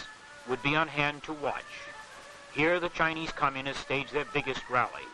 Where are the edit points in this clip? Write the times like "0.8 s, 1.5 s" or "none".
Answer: 2.7 s